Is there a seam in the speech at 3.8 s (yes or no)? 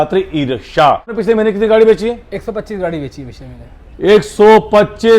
no